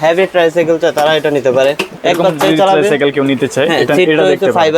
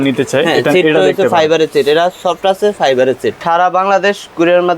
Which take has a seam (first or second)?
second